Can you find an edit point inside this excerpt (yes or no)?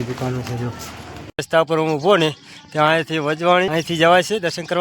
yes